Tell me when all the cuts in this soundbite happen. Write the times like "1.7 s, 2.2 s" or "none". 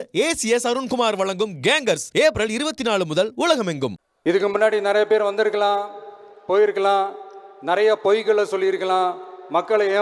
4.0 s

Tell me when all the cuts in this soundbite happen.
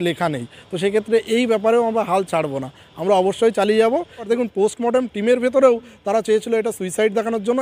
4.2 s

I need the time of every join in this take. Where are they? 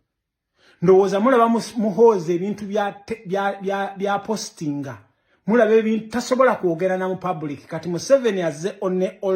none

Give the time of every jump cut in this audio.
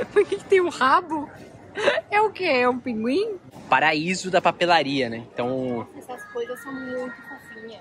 3.5 s

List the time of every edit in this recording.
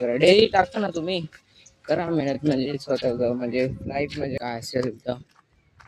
4.4 s

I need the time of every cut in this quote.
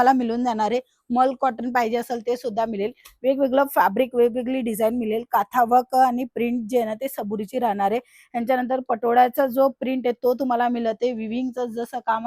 none

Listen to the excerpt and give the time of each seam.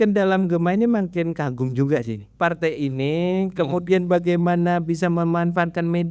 2.2 s

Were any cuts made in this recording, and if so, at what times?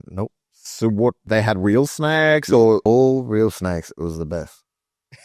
1.2 s, 2.8 s

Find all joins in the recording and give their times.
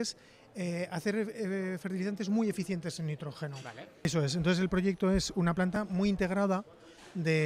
4.1 s

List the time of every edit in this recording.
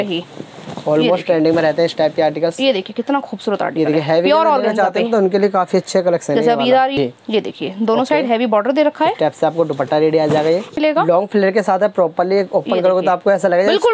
6.9 s, 10.8 s

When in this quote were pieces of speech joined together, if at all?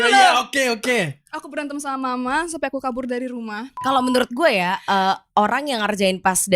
3.8 s

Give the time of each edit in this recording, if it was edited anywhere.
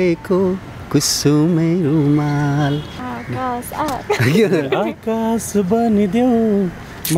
2.9 s

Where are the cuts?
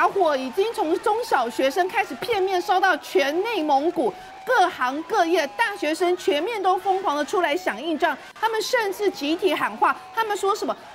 none

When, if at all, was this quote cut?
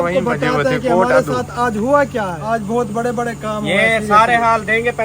2.4 s

